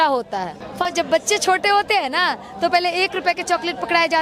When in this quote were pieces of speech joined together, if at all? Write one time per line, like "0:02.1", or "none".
0:00.9